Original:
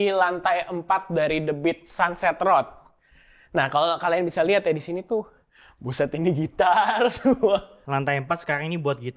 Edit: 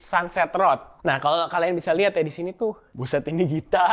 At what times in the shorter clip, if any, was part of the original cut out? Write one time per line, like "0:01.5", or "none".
0:00.9
0:02.9